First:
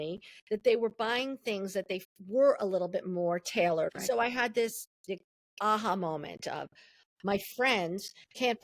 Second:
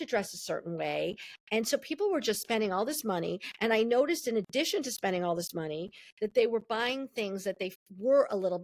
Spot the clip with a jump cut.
first; 2 cuts; at 3.9 s, 7.0 s

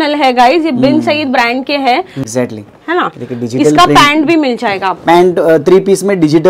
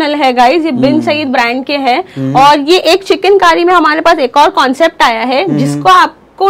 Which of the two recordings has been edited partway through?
first; 1 cut; at 2.2 s

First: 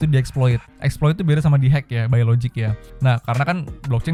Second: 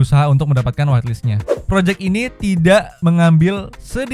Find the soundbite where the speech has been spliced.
second; 2 cuts; at 1.5 s, 2.9 s

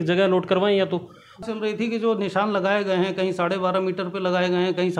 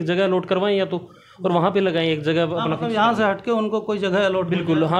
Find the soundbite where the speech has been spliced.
first; 1 cut; at 1.3 s

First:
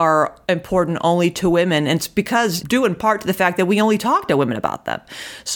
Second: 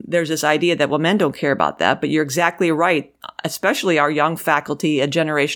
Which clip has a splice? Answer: first; 1 cut; at 2.6 s

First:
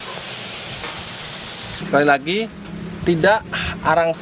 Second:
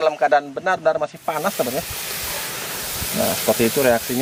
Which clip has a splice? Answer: first; 1 cut; at 1.8 s

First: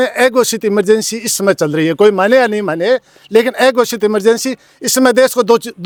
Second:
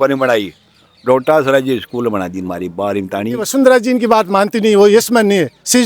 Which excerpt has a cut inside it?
second; 1 cut; at 3.5 s

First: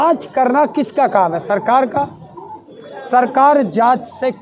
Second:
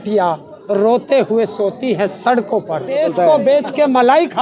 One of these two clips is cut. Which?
second; 1 cut; at 3.0 s

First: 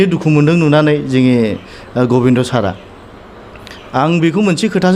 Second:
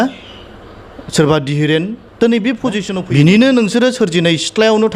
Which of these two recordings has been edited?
second; 1 cut; at 2.9 s

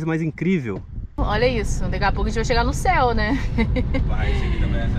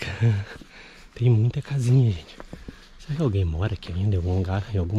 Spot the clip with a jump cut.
first; 1 cut; at 1.2 s

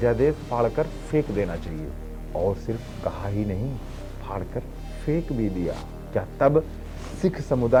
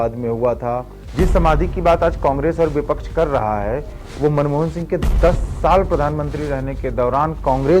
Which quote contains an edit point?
second; 1 cut; at 1.0 s

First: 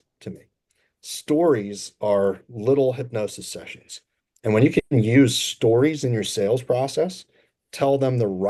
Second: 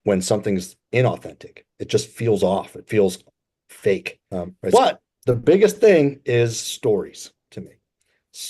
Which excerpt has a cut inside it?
second; 1 cut; at 4.7 s

